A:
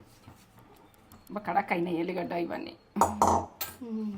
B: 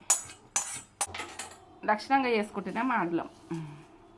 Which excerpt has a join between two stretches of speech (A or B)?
B